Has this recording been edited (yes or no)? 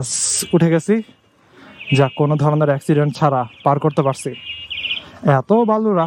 no